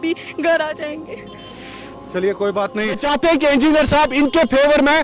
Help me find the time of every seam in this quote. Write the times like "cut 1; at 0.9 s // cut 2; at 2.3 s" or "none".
cut 1; at 3.0 s